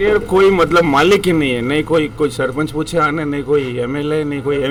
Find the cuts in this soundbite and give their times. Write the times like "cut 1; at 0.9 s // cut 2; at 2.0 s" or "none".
none